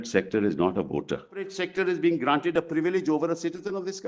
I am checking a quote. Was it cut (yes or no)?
yes